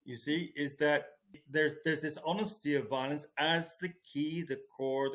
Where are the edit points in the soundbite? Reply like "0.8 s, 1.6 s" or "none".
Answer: 1.3 s